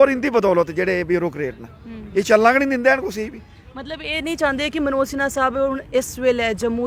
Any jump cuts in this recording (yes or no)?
no